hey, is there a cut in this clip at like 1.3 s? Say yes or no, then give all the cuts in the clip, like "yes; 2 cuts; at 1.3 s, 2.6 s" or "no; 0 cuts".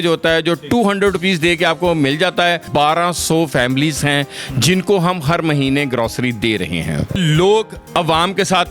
no; 2 cuts; at 2.7 s, 7.2 s